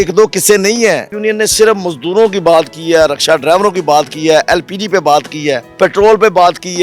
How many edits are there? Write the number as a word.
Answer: two